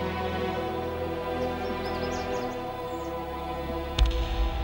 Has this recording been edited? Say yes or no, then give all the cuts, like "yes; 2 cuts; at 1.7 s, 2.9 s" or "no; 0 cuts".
yes; 1 cut; at 1.2 s